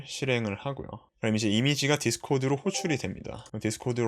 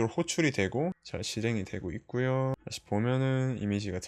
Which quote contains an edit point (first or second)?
second